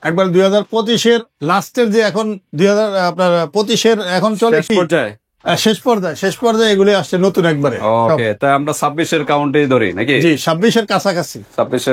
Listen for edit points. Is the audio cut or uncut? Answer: uncut